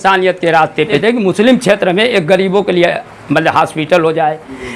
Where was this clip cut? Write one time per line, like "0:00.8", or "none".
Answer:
0:01.0